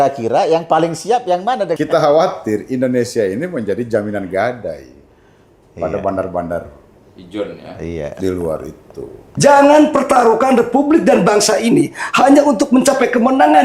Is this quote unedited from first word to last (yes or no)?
no